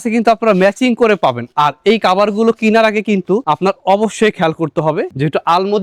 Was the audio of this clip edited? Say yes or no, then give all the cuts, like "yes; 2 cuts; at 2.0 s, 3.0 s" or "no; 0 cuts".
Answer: no; 0 cuts